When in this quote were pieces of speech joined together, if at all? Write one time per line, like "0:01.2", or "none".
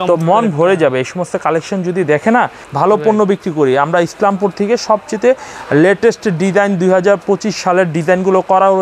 0:02.6

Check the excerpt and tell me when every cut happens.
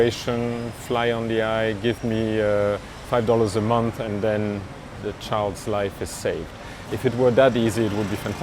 0:02.9
0:05.0

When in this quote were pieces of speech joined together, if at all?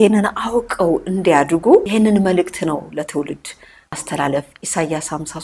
0:01.9
0:04.0

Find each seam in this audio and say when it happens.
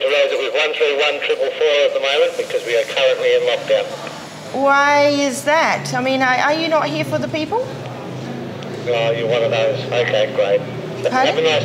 none

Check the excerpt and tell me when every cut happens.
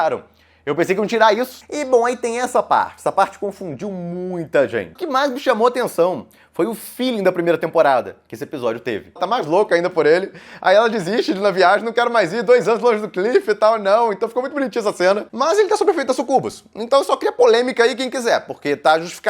0:01.6
0:05.0
0:09.2
0:15.3

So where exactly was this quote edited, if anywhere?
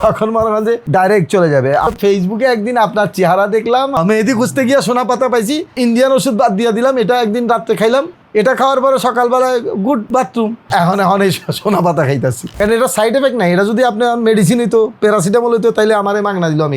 0:01.8
0:05.7
0:12.5

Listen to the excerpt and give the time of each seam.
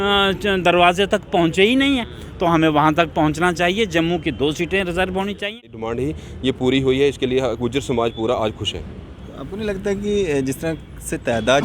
0:05.8

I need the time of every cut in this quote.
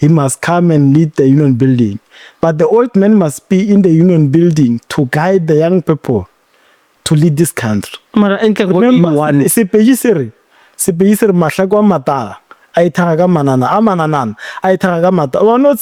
none

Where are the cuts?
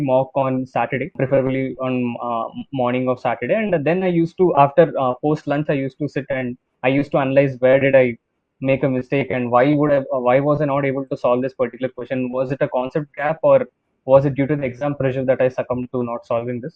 0:01.1

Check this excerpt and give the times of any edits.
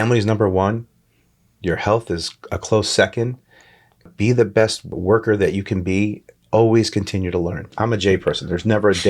0:04.1
0:05.0
0:07.7

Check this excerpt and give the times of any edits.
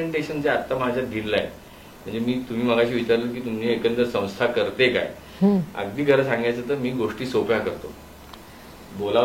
0:08.3

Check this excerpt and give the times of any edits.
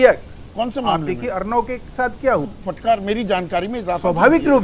0:02.5

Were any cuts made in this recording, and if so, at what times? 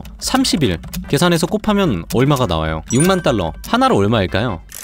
0:02.8

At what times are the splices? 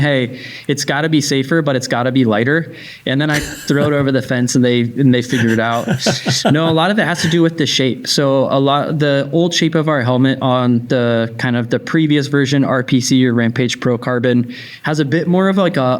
none

